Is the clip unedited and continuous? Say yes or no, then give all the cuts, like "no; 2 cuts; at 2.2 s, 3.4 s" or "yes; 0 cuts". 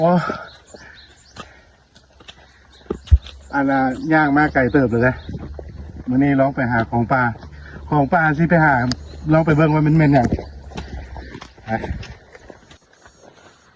no; 1 cut; at 12.8 s